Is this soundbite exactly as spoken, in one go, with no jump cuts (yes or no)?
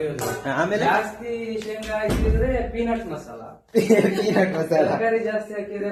yes